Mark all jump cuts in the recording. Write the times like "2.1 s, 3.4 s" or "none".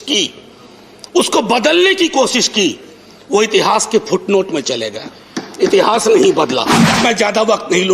6.7 s